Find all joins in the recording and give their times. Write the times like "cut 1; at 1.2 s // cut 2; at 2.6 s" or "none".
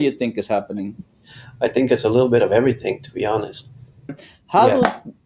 cut 1; at 4.2 s